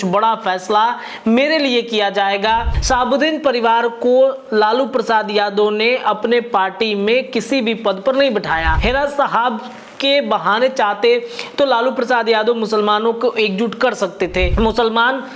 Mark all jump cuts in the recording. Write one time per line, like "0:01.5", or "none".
0:02.7
0:08.7
0:14.5